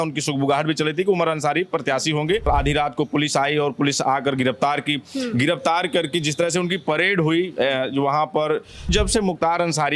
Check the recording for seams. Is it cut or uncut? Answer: cut